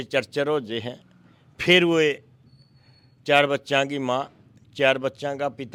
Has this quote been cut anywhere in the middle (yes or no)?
no